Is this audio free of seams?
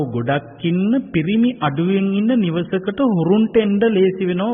yes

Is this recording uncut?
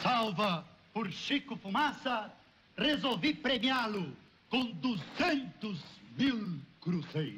yes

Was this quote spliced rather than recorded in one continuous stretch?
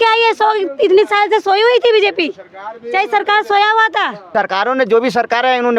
yes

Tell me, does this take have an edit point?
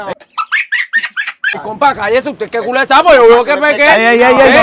no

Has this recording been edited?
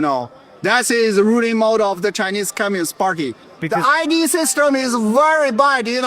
yes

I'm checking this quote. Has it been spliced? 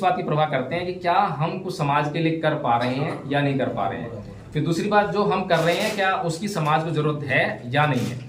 no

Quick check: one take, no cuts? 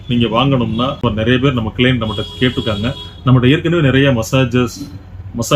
no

